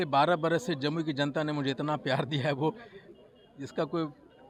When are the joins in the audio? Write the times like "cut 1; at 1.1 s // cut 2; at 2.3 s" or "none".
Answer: none